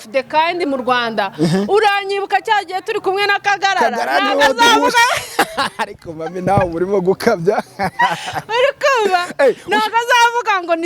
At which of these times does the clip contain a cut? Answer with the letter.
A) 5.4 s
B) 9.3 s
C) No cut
C